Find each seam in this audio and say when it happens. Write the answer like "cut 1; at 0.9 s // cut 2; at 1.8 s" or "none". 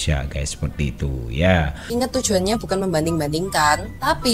cut 1; at 1.8 s